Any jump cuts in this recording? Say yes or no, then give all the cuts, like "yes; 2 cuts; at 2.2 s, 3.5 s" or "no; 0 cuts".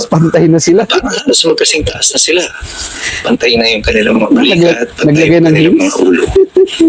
no; 0 cuts